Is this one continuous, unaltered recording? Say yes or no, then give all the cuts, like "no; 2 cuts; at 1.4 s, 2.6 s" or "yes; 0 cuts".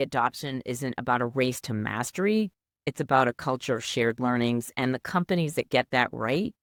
yes; 0 cuts